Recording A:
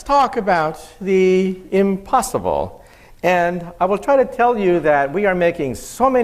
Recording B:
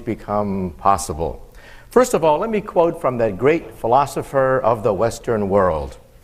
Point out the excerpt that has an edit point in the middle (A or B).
A